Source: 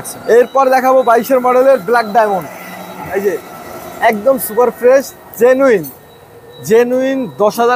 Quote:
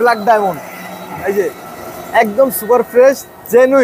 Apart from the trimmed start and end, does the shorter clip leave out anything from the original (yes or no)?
no